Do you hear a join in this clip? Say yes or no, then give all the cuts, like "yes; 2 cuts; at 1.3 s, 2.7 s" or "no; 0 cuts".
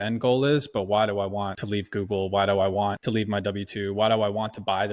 yes; 2 cuts; at 1.6 s, 3.0 s